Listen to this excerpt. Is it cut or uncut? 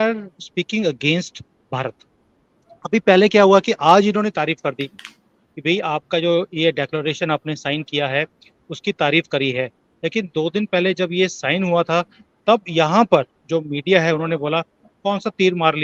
uncut